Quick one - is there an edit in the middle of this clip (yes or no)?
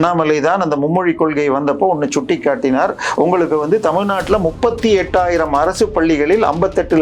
no